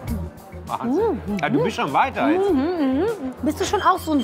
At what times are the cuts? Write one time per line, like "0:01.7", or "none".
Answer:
0:03.2